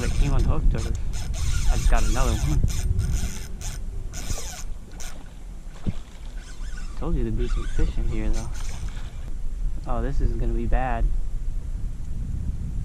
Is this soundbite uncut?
no; 1 cut; at 9.3 s

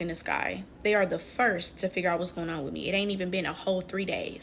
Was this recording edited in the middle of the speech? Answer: no; 0 cuts

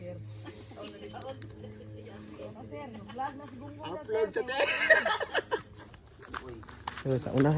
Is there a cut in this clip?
yes; 1 cut; at 5.8 s

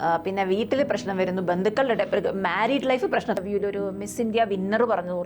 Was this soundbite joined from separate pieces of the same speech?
yes; 1 cut; at 3.4 s

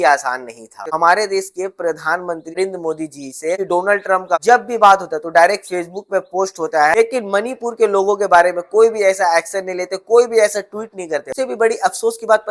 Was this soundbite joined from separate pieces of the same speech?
yes; 3 cuts; at 0.9 s, 7.0 s, 11.3 s

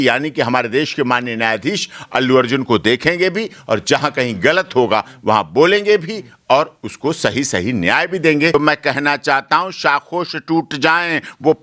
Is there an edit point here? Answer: yes; 1 cut; at 8.5 s

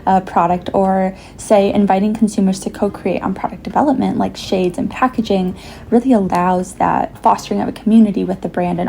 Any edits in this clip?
yes; 1 cut; at 7.2 s

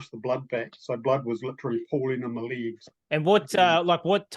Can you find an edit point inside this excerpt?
yes; 1 cut; at 2.9 s

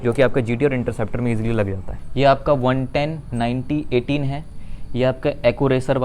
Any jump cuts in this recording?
yes; 1 cut; at 1.9 s

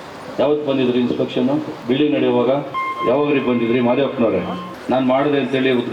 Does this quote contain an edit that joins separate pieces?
yes; 2 cuts; at 1.7 s, 2.7 s

